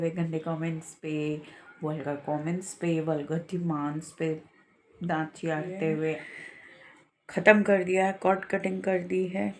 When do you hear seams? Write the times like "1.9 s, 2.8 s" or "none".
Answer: 6.3 s